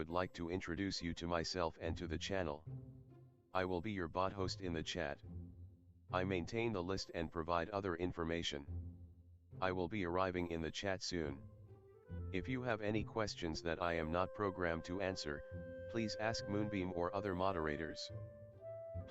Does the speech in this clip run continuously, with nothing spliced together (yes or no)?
yes